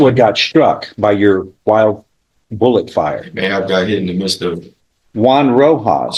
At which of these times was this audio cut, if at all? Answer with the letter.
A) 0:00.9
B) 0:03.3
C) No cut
C